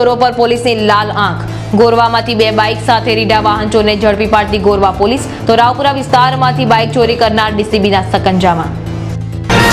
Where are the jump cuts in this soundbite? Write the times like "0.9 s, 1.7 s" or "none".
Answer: none